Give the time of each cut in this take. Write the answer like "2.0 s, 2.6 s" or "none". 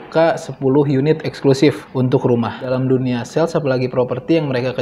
1.8 s, 2.7 s

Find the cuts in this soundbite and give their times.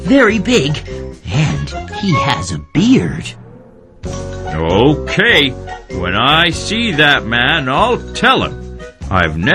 5.1 s

